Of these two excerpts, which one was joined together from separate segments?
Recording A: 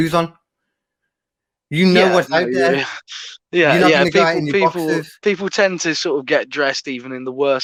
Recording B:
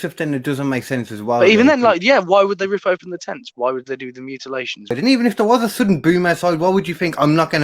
B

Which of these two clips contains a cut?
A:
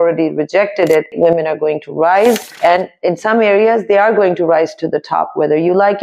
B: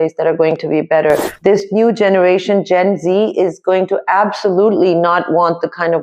A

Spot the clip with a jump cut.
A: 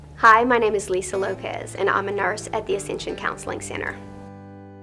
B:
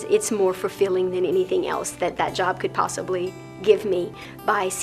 A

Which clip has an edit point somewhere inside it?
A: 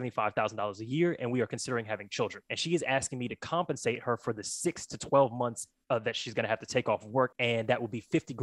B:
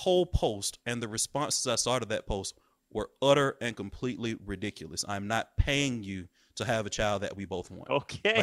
A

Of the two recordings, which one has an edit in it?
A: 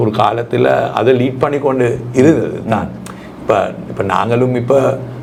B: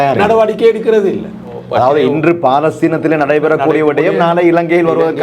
B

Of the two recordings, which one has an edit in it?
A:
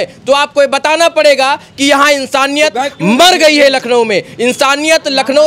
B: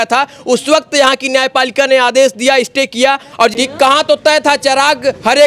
B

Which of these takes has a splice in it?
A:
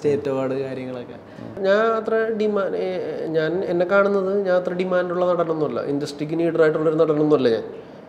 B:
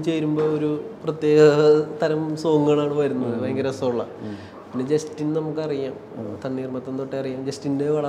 A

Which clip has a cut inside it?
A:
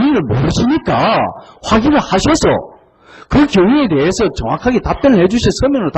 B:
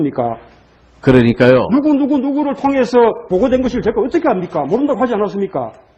B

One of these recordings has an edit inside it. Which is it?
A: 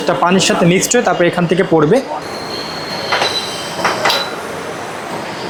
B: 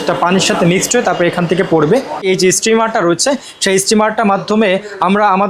B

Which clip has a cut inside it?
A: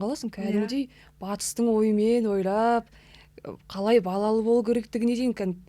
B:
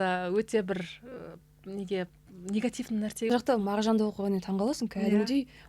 B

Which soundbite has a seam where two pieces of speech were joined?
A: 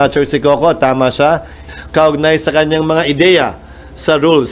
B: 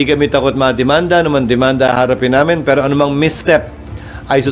A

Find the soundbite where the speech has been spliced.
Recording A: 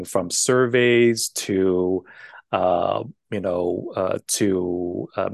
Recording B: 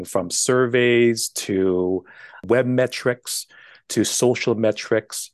B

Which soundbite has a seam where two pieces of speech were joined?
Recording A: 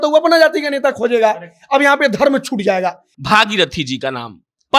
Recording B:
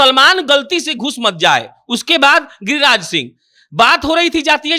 A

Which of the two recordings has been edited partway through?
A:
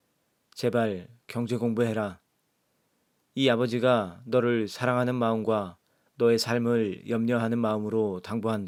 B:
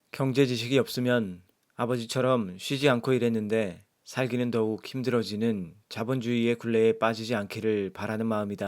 B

